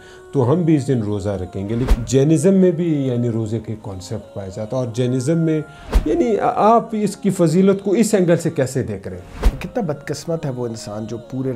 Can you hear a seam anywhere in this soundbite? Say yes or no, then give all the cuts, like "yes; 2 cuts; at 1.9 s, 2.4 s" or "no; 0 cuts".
yes; 3 cuts; at 1.9 s, 5.9 s, 9.4 s